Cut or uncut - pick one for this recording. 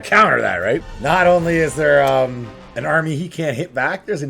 cut